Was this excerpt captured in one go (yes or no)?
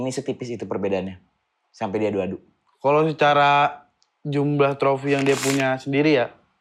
yes